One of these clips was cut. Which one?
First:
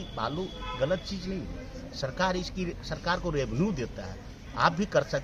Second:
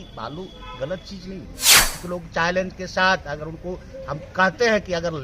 second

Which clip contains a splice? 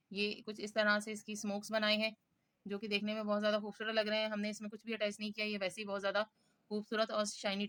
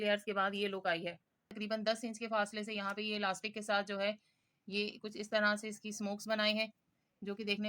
second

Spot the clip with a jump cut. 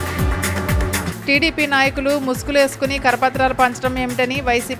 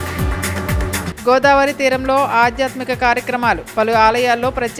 first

